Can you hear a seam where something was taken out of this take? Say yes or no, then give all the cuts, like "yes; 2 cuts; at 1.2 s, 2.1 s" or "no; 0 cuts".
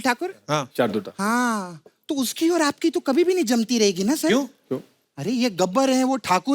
no; 0 cuts